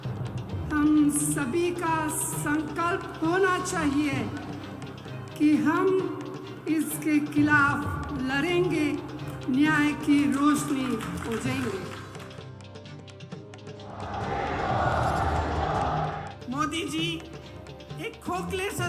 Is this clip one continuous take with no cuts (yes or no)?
no